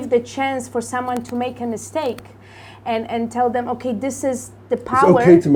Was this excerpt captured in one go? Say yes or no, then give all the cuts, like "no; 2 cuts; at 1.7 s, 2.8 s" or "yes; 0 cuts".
yes; 0 cuts